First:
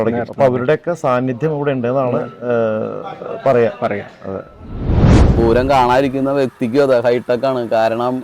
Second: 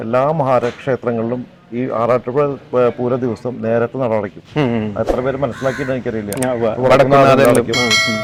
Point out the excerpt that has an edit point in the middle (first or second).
first